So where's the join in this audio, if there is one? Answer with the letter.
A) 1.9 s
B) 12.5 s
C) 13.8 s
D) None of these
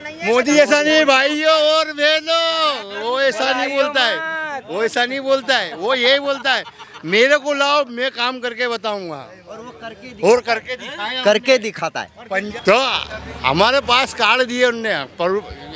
B